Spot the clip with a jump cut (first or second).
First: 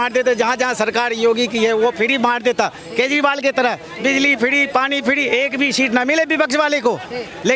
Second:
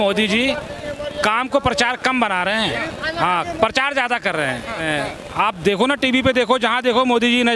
second